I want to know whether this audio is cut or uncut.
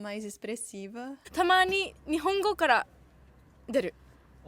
cut